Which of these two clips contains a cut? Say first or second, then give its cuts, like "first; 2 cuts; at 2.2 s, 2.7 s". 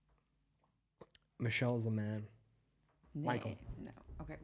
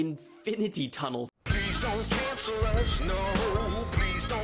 second; 1 cut; at 1.3 s